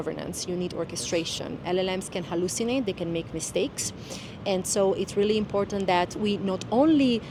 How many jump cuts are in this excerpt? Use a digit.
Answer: 0